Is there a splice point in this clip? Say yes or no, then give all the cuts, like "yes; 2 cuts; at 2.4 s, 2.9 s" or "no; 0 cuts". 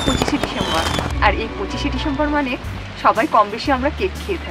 no; 0 cuts